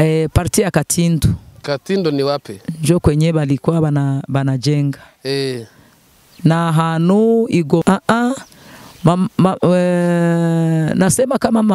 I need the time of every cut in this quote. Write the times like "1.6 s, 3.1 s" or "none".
7.8 s